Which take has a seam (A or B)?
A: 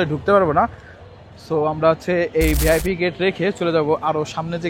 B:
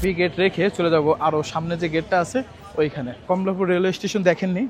B